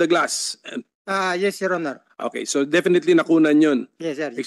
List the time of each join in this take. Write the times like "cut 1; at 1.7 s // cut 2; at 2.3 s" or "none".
none